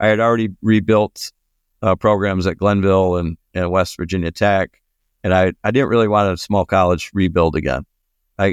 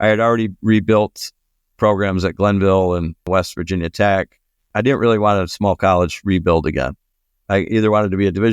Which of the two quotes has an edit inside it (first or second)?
second